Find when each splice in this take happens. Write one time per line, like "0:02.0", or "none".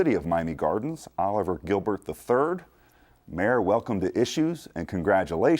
0:03.5